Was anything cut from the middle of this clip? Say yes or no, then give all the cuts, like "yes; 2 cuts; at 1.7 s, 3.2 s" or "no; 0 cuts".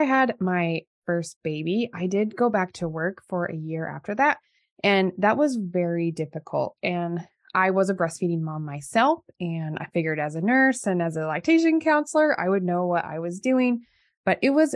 no; 0 cuts